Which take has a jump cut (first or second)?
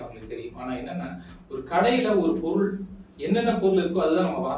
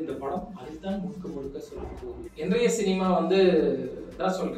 second